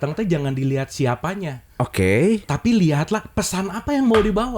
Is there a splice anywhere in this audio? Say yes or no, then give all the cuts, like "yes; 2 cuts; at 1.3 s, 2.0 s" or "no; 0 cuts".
no; 0 cuts